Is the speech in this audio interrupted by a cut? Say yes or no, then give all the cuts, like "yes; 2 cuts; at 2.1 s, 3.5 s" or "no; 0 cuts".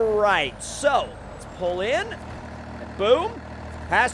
no; 0 cuts